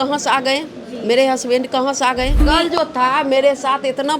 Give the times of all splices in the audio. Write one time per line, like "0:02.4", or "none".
0:02.4